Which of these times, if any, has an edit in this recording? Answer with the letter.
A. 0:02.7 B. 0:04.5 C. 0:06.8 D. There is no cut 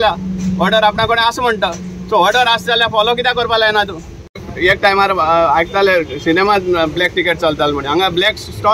B